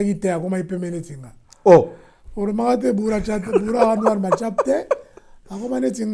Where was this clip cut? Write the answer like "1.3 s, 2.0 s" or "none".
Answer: none